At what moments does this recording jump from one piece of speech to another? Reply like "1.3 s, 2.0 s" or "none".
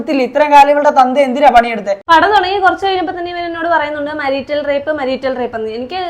1.9 s